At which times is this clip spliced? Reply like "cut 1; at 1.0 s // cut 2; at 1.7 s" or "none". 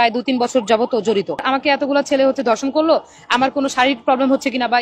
cut 1; at 1.4 s